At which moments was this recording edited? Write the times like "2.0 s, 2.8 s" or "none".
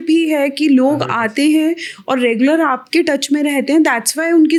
none